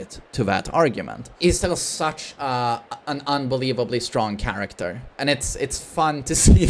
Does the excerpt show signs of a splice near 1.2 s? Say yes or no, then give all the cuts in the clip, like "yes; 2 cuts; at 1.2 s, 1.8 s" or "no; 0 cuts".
yes; 1 cut; at 1.2 s